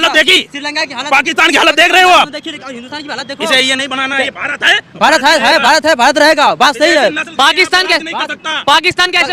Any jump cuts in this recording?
no; 0 cuts

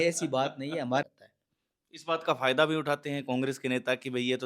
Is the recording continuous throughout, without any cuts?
no; 1 cut; at 1.0 s

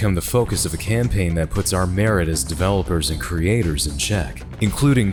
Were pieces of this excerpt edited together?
no; 0 cuts

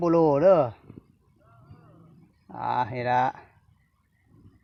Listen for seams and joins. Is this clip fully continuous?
yes; 0 cuts

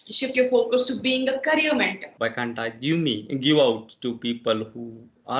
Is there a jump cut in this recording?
yes; 1 cut; at 2.0 s

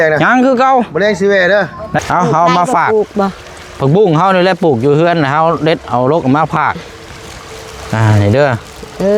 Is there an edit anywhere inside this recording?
yes; 1 cut; at 2.0 s

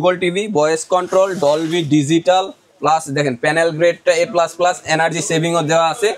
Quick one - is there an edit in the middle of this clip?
no; 0 cuts

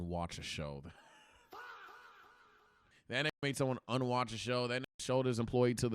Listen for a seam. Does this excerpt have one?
yes; 1 cut; at 2.9 s

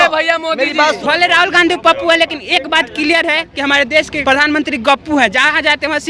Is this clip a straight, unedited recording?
no; 2 cuts; at 1.0 s, 4.1 s

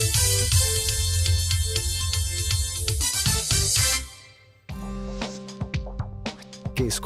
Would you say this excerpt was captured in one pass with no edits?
yes; 0 cuts

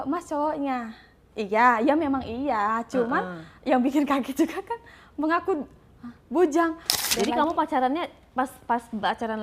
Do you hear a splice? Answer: yes; 1 cut; at 6.9 s

